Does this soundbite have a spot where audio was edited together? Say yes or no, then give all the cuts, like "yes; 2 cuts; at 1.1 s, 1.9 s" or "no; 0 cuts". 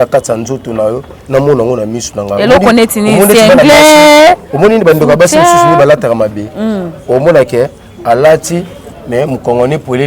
no; 0 cuts